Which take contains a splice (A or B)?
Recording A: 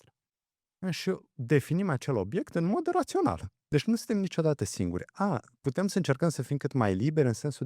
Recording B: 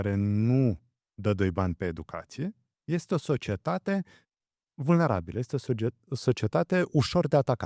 A